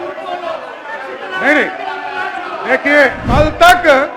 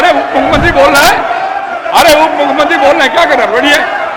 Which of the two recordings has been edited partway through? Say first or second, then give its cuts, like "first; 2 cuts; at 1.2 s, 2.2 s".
first; 1 cut; at 3.2 s